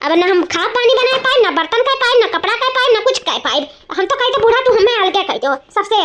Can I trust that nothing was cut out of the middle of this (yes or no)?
yes